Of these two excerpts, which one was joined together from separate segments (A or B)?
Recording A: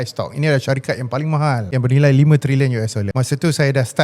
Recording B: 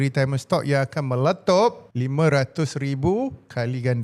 A